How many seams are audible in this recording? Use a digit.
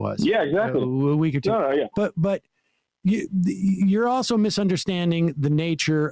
1